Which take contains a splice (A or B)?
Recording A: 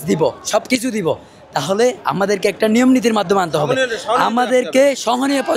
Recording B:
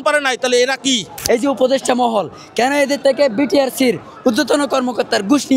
B